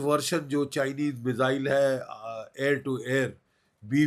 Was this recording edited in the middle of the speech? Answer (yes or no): no